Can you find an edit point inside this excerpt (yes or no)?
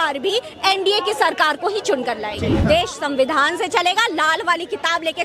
yes